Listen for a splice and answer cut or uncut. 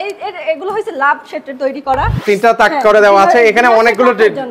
cut